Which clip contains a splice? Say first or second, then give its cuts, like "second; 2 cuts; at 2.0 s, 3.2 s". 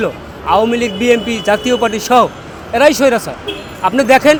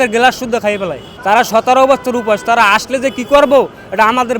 second; 1 cut; at 1.1 s